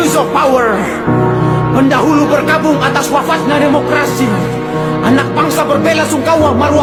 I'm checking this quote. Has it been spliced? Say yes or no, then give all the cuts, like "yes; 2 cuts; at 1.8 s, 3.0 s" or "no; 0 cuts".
no; 0 cuts